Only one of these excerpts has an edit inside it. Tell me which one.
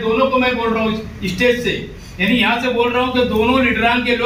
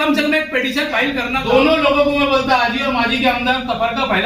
second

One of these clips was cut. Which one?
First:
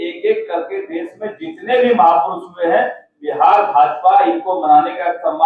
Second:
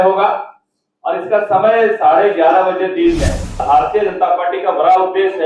second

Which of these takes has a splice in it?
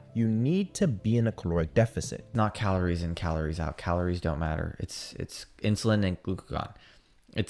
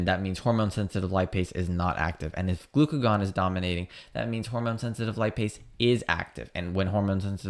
first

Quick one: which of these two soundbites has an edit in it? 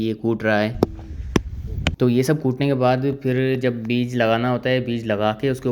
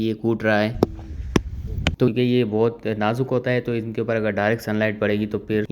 second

